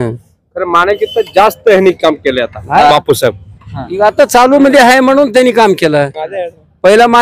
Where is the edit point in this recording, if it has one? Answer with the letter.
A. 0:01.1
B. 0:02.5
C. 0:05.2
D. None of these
D